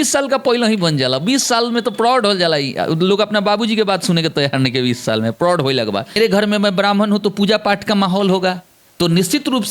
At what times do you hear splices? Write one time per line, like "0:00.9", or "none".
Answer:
0:06.2